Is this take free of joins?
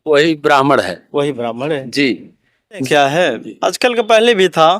no; 1 cut; at 2.8 s

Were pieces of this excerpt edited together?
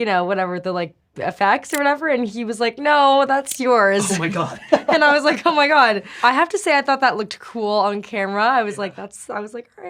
yes; 1 cut; at 6.1 s

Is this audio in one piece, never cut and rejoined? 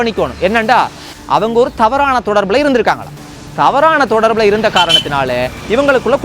no; 1 cut; at 1.1 s

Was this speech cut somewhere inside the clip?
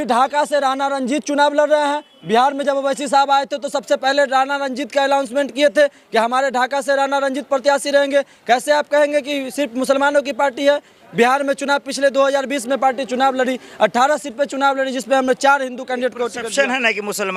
no; 0 cuts

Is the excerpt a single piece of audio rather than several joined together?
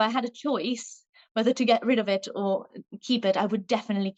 yes; 0 cuts

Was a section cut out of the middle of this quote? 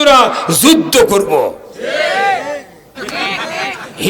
yes; 1 cut; at 2.9 s

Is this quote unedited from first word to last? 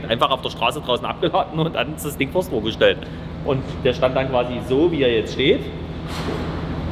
yes; 0 cuts

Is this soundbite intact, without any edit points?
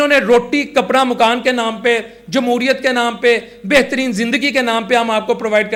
yes; 0 cuts

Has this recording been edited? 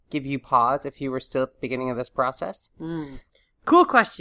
yes; 1 cut; at 3.2 s

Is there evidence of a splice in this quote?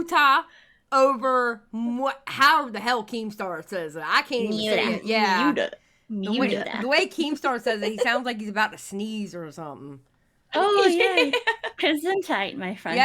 no; 0 cuts

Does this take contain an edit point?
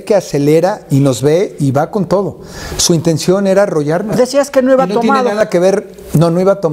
yes; 1 cut; at 4.1 s

